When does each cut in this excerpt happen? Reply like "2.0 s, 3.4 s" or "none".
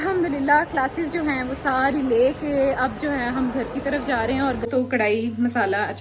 4.7 s